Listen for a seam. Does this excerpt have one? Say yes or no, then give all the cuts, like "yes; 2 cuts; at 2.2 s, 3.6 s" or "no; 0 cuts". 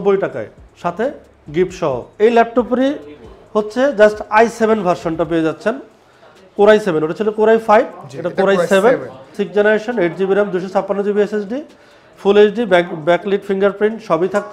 no; 0 cuts